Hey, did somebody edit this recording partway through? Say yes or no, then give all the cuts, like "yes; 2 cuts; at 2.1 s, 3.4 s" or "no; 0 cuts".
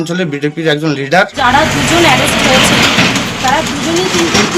yes; 1 cut; at 1.4 s